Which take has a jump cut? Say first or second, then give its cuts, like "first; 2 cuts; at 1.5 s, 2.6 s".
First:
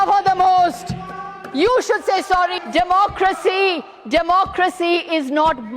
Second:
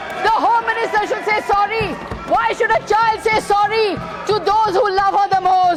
first; 1 cut; at 2.6 s